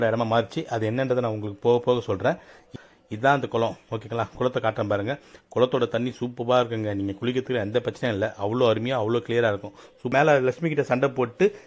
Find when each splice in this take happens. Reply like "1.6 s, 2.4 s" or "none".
2.8 s, 10.1 s